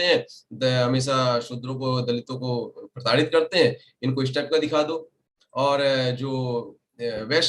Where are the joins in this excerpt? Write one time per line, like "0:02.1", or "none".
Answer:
none